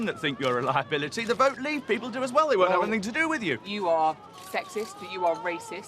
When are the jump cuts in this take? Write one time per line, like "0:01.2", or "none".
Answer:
0:03.6